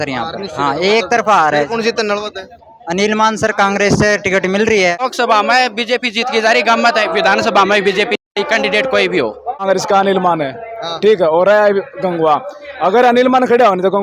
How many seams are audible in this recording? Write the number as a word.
two